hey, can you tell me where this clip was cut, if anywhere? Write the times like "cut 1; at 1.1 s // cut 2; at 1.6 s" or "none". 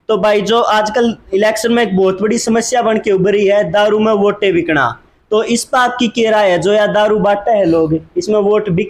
none